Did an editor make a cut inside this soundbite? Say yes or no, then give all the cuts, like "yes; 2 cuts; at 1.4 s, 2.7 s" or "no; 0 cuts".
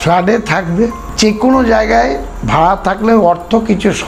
yes; 1 cut; at 1.0 s